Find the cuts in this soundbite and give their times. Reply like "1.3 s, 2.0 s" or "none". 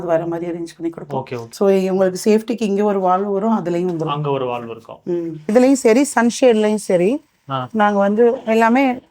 1.4 s, 5.4 s